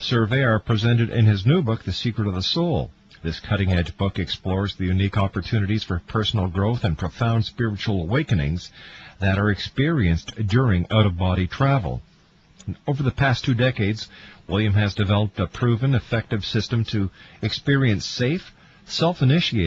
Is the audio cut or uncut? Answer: uncut